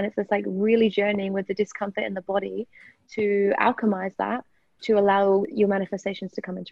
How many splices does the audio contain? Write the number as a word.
one